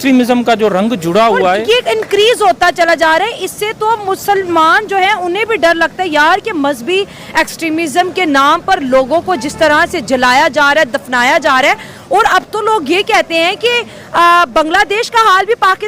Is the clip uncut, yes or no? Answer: yes